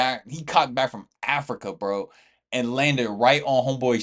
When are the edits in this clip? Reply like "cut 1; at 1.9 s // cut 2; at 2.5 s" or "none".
none

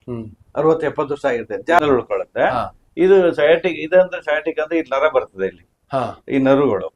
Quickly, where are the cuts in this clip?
cut 1; at 1.8 s

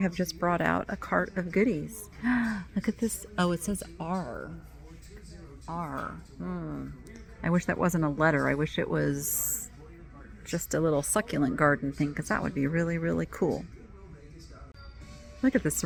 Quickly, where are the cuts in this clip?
none

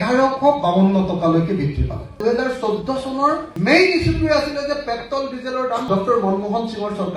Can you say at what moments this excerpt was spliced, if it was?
none

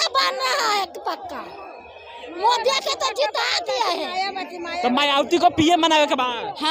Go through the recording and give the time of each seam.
none

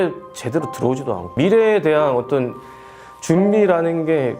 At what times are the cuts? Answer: cut 1; at 1.3 s

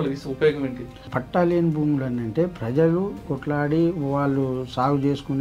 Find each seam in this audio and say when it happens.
cut 1; at 1.1 s // cut 2; at 3.3 s

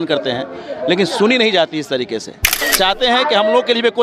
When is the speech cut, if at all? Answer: cut 1; at 2.5 s

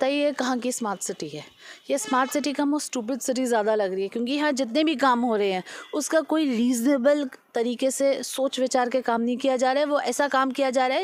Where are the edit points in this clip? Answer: none

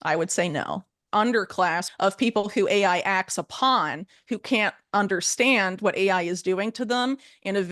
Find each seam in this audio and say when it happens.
cut 1; at 1.0 s // cut 2; at 1.9 s

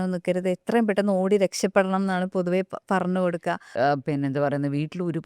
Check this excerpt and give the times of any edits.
cut 1; at 3.7 s

